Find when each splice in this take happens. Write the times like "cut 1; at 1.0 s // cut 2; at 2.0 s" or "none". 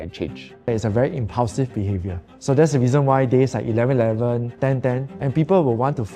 cut 1; at 0.7 s // cut 2; at 4.5 s